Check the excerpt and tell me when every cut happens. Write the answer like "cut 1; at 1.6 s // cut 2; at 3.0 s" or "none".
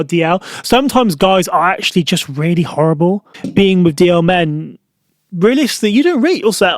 cut 1; at 3.3 s